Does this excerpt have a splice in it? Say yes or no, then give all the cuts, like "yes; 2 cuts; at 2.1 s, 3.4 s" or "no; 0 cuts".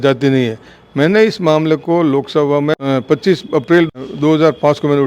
yes; 2 cuts; at 2.8 s, 4.0 s